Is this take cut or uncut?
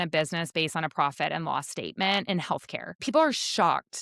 cut